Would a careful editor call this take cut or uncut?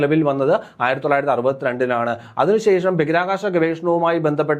uncut